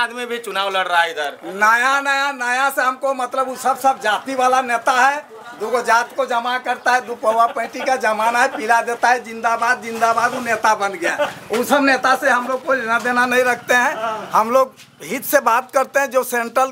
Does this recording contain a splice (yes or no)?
no